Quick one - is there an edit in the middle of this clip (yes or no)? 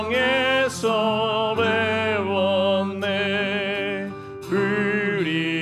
no